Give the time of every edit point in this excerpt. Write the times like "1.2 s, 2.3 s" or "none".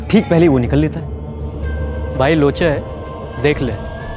none